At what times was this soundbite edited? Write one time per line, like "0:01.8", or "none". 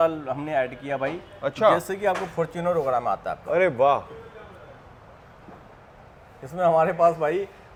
none